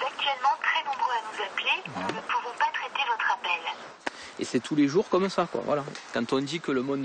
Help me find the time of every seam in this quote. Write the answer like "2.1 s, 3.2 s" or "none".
3.9 s